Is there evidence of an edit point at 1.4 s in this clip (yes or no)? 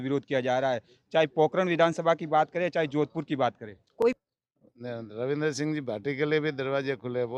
no